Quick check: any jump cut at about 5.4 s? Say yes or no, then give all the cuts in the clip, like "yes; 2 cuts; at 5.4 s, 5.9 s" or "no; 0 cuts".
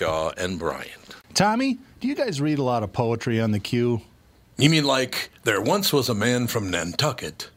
no; 1 cut; at 1.2 s